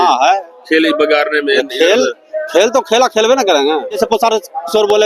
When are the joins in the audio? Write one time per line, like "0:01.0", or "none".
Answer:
0:04.0